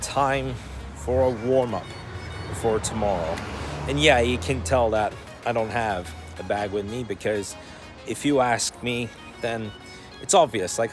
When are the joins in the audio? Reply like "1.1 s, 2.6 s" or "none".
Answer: none